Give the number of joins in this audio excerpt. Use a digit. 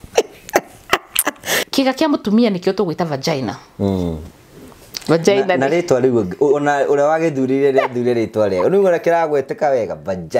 1